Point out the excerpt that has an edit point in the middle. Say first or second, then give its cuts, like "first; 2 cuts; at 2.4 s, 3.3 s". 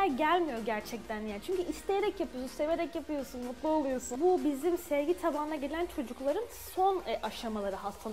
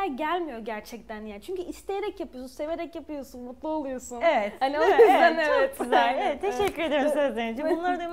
first; 1 cut; at 4.0 s